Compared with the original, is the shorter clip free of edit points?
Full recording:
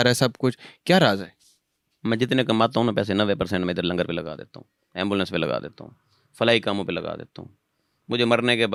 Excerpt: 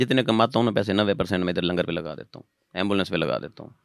yes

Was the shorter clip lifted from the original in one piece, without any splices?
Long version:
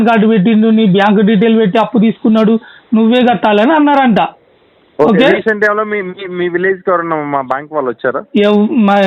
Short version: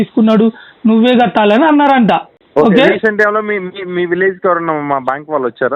no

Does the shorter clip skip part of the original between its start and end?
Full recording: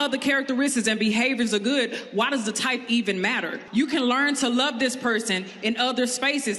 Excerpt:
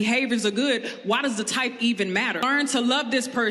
yes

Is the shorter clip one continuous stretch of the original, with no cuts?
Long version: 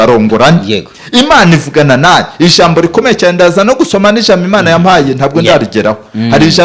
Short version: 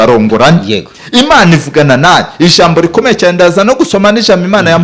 yes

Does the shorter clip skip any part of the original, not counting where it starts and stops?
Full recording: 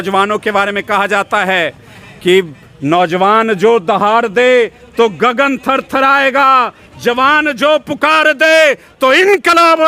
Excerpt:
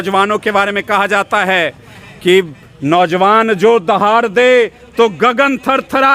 no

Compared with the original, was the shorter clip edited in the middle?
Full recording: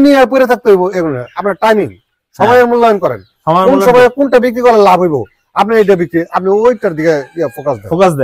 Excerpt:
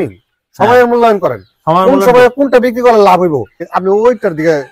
yes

